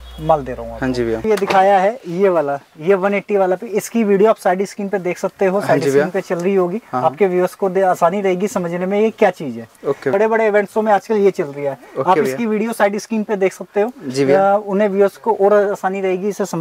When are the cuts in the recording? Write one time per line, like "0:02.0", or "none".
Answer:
0:01.2
0:10.1